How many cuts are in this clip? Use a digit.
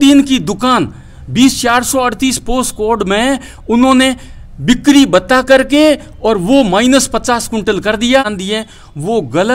1